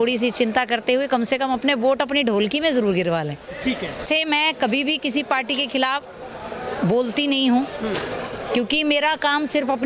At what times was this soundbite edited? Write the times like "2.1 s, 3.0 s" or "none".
4.0 s